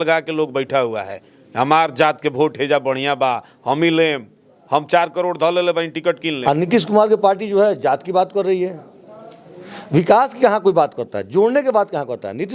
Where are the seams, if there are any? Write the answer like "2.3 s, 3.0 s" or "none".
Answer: 6.4 s

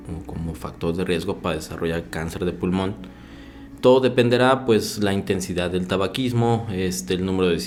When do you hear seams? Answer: none

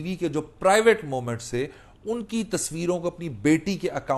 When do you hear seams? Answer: none

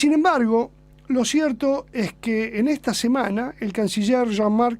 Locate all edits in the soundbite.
2.2 s

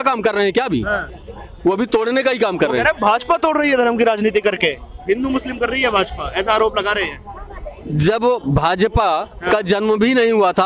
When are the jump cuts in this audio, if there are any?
none

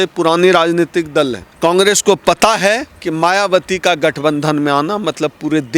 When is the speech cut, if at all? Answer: 1.4 s

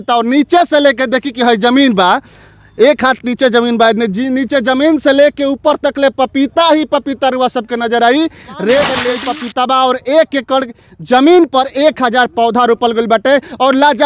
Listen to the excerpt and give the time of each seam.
9.1 s

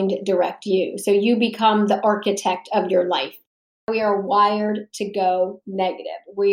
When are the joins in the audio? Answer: 3.4 s

